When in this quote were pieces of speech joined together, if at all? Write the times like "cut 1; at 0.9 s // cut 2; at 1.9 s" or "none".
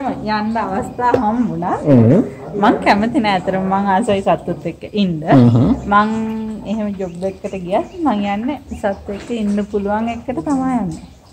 none